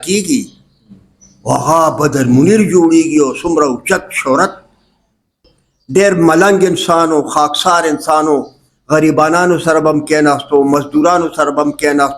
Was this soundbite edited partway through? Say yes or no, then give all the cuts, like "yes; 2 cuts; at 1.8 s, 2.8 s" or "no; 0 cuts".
yes; 1 cut; at 5.4 s